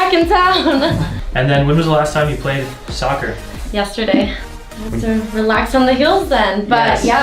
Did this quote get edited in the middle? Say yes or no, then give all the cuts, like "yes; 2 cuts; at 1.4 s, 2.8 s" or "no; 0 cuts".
yes; 2 cuts; at 1.2 s, 4.4 s